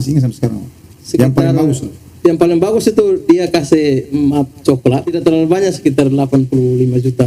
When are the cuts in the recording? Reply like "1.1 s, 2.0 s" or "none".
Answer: 5.2 s